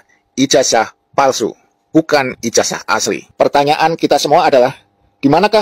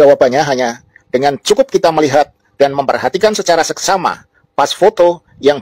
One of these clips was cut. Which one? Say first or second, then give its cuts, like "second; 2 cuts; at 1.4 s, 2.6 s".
first; 1 cut; at 3.2 s